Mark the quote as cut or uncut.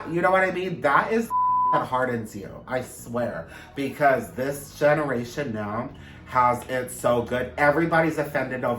uncut